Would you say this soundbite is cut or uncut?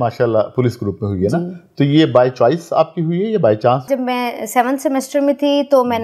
cut